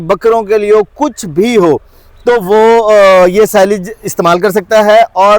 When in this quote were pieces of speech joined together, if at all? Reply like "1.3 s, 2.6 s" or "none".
none